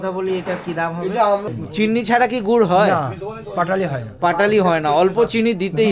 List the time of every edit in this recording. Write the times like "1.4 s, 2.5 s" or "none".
1.4 s